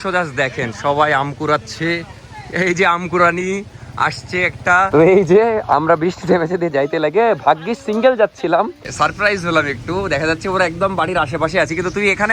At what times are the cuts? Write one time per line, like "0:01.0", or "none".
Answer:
0:04.9
0:08.9